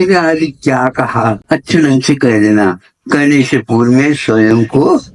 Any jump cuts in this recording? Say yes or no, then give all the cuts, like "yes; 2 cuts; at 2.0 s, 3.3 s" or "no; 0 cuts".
yes; 1 cut; at 1.4 s